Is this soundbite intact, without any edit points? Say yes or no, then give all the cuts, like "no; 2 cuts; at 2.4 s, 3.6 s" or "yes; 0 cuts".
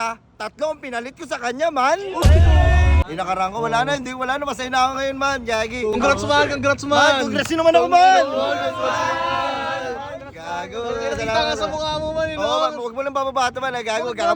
no; 2 cuts; at 3.0 s, 5.9 s